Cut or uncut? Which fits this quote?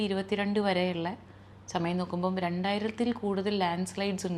uncut